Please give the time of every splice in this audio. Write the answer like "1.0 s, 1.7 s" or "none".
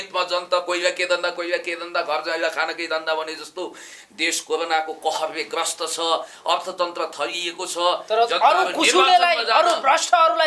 none